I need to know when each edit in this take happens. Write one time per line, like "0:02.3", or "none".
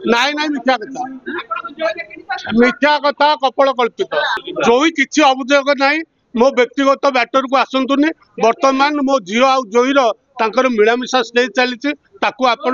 0:04.5